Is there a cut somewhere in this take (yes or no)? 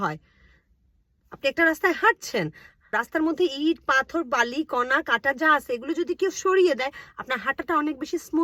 yes